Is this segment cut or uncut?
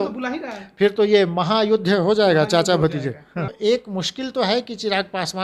cut